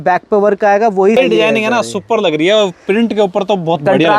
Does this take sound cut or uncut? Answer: cut